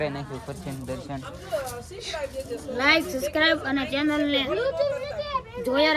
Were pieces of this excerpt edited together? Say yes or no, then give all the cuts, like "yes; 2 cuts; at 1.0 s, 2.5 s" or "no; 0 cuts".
no; 0 cuts